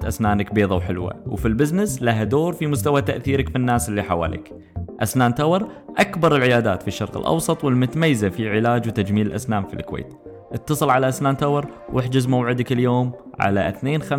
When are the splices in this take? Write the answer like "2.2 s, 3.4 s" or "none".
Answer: none